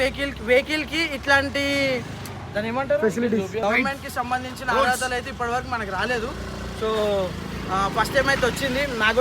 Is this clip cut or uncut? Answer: cut